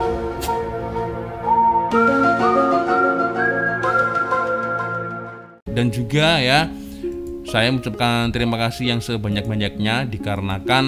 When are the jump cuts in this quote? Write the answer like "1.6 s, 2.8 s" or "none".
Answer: 5.6 s